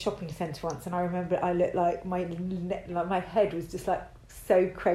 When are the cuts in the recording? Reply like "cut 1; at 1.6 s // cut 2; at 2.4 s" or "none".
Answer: none

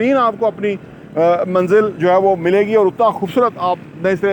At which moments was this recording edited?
none

